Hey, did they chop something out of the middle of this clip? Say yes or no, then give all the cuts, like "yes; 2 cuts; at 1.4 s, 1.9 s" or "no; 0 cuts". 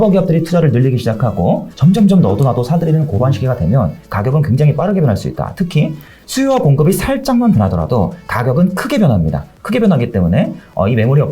yes; 2 cuts; at 1.7 s, 4.1 s